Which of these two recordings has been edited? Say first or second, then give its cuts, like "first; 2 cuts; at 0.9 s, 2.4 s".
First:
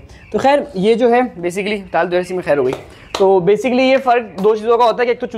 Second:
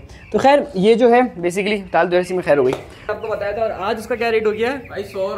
second; 1 cut; at 3.1 s